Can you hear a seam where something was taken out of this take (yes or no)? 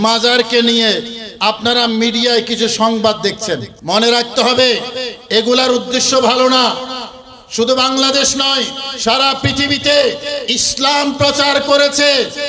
yes